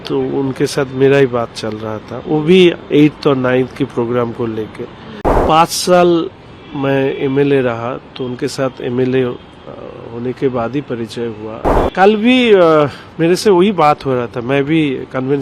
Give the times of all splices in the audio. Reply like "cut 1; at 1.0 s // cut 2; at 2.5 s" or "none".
cut 1; at 5.4 s // cut 2; at 11.8 s